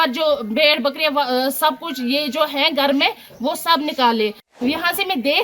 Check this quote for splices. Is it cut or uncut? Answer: cut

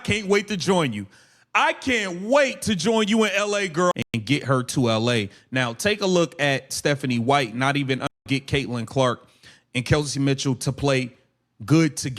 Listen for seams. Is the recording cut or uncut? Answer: cut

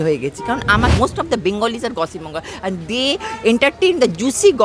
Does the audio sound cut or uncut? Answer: cut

